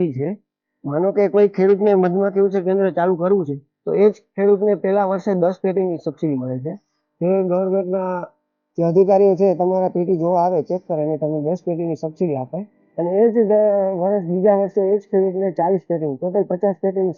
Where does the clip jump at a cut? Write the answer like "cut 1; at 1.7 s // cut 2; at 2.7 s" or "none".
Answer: none